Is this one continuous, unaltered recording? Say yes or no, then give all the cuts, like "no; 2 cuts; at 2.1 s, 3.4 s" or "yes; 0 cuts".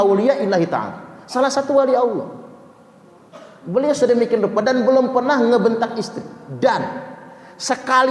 yes; 0 cuts